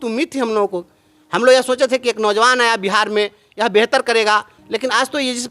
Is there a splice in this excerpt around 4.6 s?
yes; 1 cut; at 4.6 s

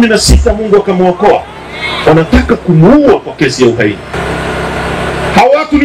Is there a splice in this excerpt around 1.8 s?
no; 1 cut; at 4.1 s

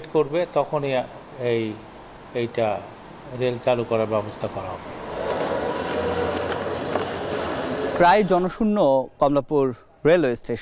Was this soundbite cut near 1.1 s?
no; 0 cuts

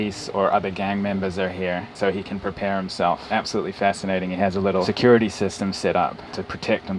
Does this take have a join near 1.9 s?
no; 0 cuts

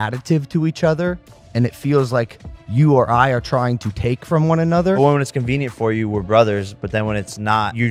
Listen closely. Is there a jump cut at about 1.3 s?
no; 0 cuts

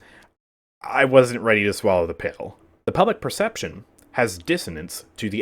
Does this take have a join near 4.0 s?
no; 1 cut; at 2.7 s

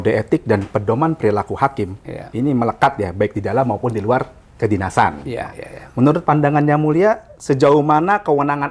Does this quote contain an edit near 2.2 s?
no; 0 cuts

